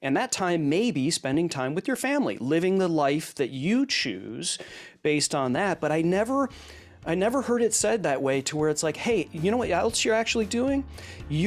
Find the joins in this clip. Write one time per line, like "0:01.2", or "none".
none